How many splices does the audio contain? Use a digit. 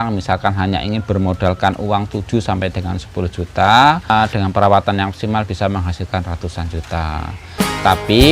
1